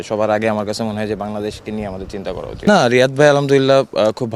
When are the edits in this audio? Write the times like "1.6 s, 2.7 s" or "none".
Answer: 2.6 s